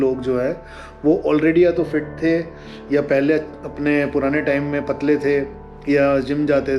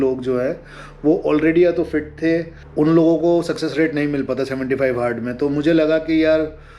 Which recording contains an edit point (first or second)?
second